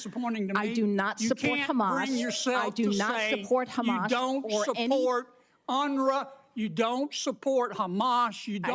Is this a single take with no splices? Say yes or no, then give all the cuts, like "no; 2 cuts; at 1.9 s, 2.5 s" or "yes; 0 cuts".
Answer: yes; 0 cuts